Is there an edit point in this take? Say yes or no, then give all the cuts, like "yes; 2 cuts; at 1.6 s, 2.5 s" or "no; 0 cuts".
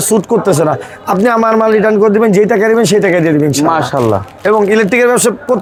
no; 0 cuts